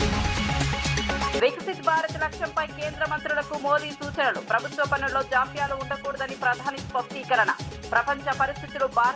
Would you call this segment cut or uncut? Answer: cut